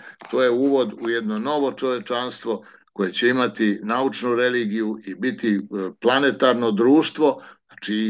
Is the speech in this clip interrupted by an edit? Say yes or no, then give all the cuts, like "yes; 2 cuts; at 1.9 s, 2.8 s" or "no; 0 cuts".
no; 0 cuts